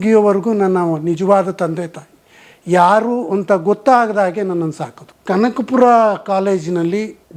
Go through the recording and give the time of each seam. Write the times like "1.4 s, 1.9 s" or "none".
5.1 s

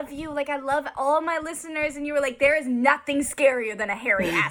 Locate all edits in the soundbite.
none

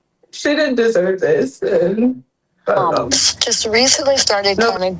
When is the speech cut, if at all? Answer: 3.3 s

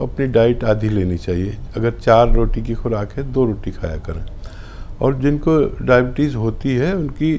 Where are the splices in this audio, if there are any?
none

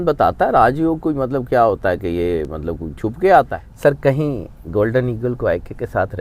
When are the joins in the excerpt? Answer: 3.6 s

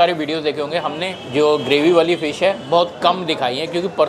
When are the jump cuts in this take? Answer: 1.1 s

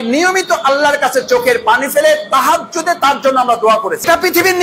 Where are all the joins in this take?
none

